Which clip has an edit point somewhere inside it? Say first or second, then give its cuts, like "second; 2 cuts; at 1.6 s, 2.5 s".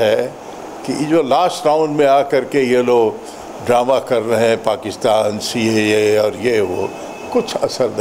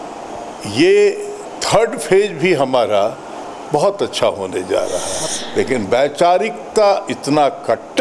second; 1 cut; at 5.2 s